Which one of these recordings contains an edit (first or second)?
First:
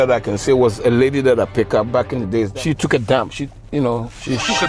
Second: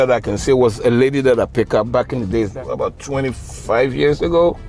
first